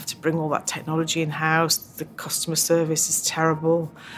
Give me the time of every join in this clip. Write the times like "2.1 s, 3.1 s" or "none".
none